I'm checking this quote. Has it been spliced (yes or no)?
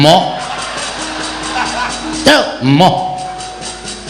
no